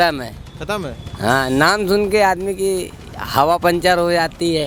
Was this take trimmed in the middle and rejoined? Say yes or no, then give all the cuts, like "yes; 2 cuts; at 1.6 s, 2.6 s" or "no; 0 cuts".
no; 0 cuts